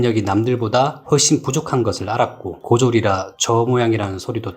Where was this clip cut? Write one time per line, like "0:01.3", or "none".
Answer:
0:03.3

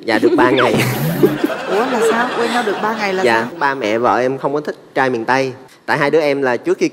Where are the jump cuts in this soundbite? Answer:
0:05.6

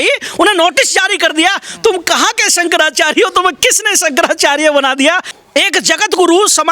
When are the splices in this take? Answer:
0:05.3

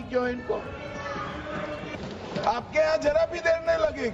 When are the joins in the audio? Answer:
0:01.9

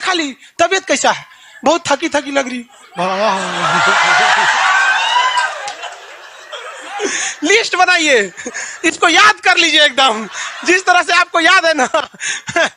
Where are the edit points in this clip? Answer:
none

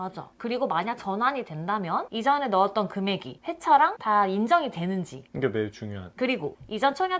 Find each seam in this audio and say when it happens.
none

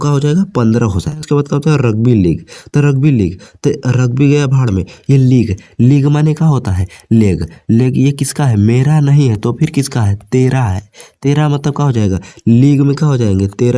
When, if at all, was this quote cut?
0:01.2

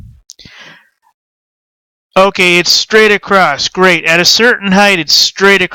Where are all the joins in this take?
0:01.7

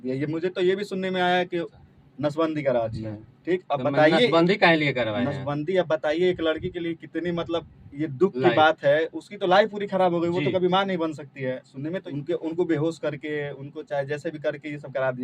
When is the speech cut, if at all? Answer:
0:01.8
0:12.0

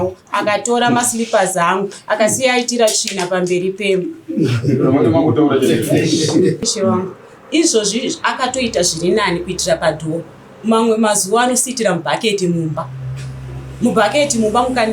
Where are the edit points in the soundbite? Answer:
0:06.6

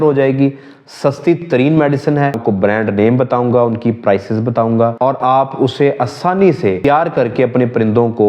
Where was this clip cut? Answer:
0:02.4
0:04.9
0:06.8

